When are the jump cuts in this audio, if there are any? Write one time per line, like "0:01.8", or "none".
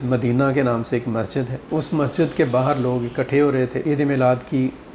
0:01.6
0:03.8

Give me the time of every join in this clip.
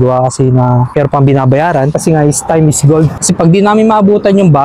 0:00.9
0:01.9
0:03.2

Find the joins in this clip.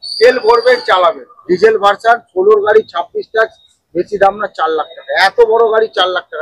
0:01.3

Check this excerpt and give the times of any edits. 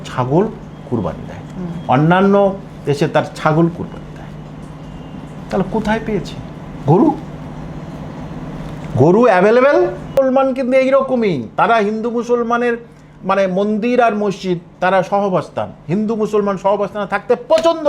0:10.2

